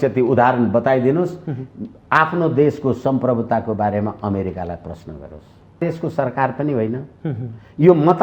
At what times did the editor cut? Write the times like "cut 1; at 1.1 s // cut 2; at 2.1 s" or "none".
cut 1; at 5.8 s